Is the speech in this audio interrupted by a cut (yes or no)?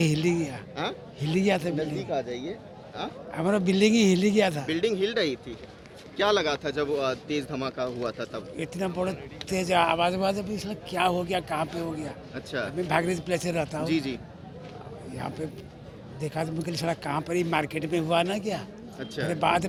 no